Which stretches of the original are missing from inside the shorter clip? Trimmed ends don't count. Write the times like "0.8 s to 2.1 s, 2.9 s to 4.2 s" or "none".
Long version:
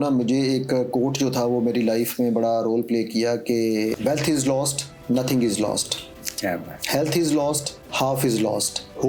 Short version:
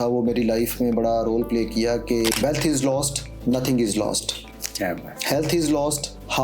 3.7 s to 4.0 s